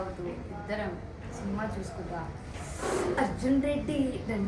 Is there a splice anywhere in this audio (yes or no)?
no